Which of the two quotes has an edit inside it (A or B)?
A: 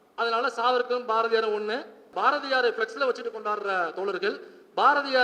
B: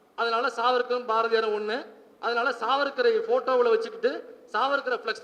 A